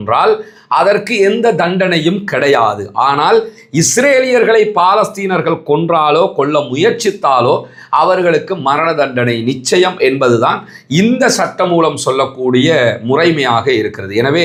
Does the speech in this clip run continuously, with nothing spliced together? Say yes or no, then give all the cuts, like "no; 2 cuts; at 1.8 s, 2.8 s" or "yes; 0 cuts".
yes; 0 cuts